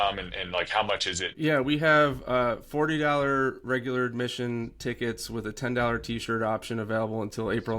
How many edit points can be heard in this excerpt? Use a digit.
1